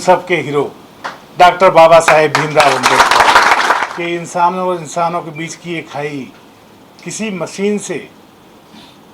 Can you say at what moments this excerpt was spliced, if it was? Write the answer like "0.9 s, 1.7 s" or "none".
3.9 s